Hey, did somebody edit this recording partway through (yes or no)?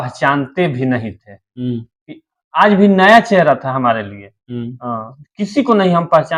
no